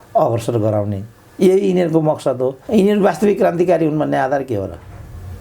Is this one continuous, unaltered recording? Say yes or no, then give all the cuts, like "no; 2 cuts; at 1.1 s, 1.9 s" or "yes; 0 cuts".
no; 1 cut; at 2.6 s